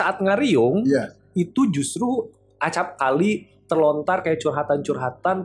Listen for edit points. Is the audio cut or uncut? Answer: uncut